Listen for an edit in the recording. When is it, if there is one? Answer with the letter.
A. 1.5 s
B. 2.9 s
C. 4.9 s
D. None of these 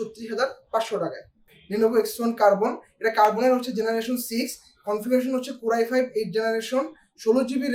A